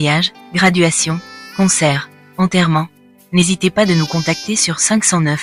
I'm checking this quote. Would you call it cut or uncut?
uncut